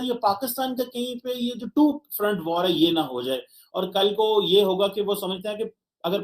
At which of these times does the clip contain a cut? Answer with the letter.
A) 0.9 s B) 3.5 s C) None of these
C